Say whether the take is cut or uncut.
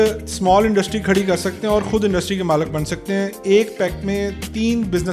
uncut